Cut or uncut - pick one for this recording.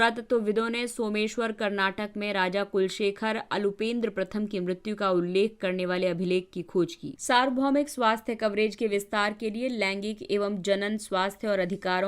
cut